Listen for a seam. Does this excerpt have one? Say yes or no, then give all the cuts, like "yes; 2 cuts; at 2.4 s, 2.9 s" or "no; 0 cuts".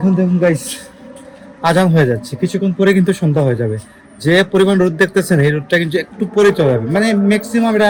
no; 0 cuts